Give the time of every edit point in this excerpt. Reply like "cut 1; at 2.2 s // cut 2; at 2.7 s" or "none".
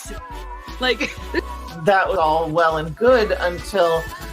cut 1; at 2.1 s